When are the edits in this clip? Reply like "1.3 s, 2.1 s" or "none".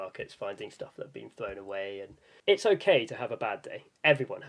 2.2 s

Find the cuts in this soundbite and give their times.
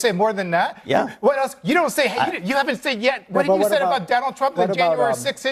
none

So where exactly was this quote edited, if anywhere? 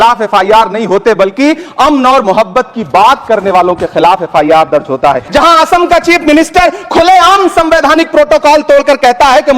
5.2 s

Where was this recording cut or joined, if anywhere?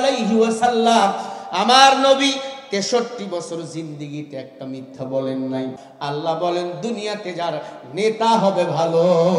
5.8 s

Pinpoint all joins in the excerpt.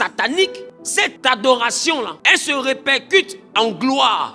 1.1 s, 2.2 s

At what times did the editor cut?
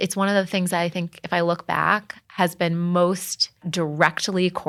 none

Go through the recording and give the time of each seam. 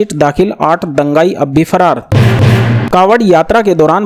2.1 s

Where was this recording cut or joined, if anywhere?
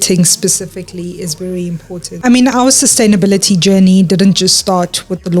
2.2 s

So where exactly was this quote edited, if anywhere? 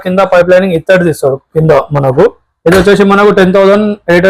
1.4 s

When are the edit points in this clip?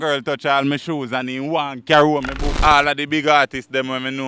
2.4 s

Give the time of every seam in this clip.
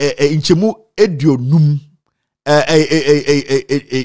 none

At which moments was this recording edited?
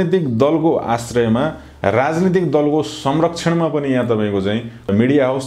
none

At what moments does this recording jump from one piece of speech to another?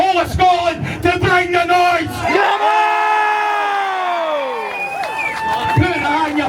none

